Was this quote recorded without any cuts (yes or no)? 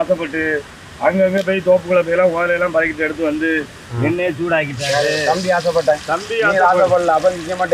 yes